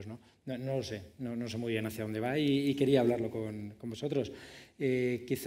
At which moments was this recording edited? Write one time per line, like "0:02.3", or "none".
none